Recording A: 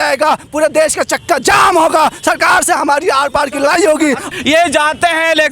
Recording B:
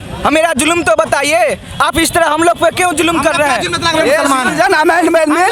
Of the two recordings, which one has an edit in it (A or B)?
A